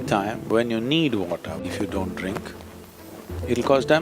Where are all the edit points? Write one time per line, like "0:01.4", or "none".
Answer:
0:01.6